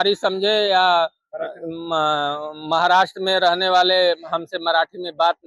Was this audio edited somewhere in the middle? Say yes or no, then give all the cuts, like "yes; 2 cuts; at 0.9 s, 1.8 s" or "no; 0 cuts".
no; 0 cuts